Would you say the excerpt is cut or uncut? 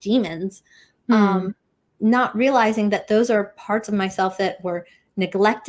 uncut